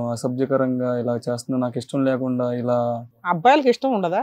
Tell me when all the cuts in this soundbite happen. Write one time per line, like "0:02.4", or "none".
0:03.2